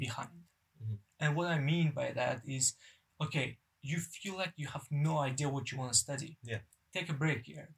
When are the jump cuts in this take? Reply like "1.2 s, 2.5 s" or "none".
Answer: none